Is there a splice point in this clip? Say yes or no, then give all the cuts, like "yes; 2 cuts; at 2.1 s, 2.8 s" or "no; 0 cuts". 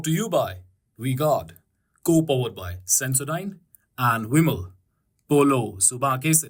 no; 0 cuts